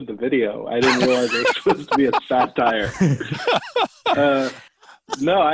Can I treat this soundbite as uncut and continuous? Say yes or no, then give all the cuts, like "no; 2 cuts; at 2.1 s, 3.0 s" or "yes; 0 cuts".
yes; 0 cuts